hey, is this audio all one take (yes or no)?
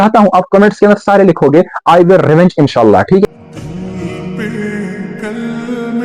no